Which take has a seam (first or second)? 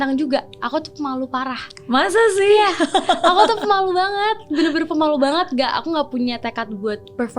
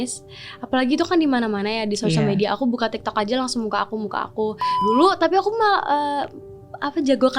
second